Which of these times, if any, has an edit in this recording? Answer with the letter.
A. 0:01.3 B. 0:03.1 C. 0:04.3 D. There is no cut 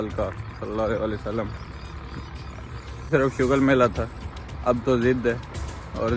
B